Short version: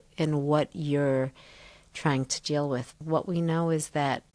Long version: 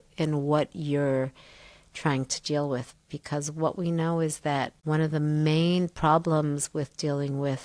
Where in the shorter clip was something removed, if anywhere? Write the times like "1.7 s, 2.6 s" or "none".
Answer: 3.0 s

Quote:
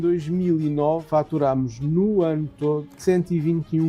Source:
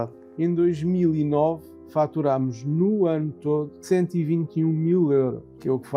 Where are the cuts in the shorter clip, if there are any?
1.0 s

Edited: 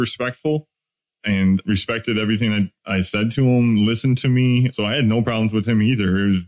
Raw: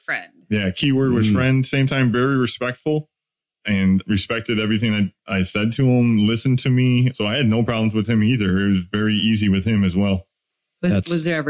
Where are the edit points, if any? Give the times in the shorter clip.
none

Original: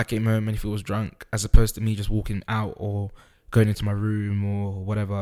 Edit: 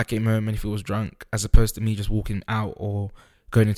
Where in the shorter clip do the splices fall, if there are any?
none

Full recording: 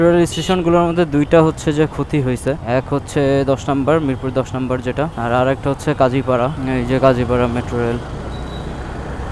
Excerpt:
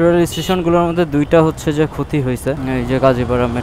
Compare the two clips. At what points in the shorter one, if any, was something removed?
2.6 s

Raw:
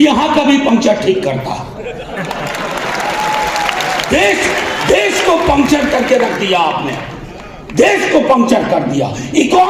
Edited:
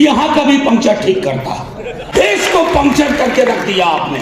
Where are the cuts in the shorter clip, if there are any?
2.0 s

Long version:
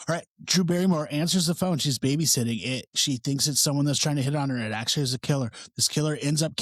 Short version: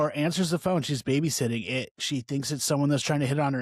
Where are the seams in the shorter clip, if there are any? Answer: none

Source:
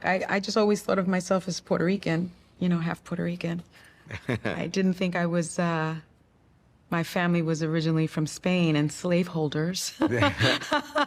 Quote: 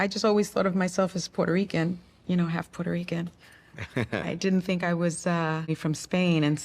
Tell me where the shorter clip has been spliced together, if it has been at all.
5.8 s

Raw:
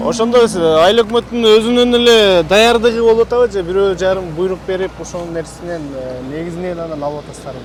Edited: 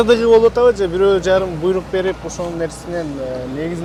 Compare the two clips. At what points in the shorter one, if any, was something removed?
none

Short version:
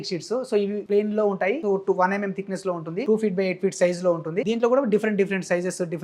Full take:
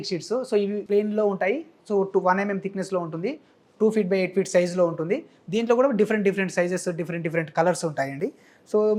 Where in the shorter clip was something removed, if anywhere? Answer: 1.6 s, 3.0 s, 4.4 s

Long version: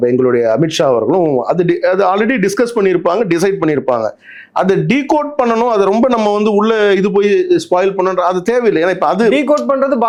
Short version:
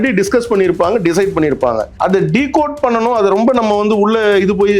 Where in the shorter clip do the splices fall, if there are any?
1.9 s

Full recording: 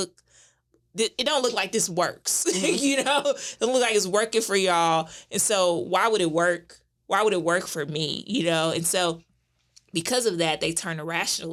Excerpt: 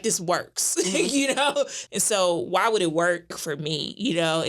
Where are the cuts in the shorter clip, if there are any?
1.8 s, 3.5 s

